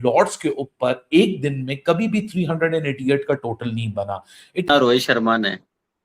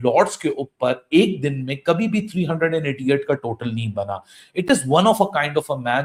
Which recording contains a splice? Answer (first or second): first